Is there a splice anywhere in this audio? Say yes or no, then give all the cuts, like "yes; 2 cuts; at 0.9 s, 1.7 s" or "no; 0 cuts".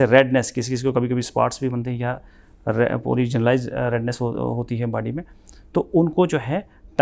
no; 0 cuts